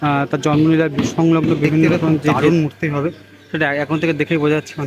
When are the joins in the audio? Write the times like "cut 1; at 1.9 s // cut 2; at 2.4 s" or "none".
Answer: cut 1; at 2.4 s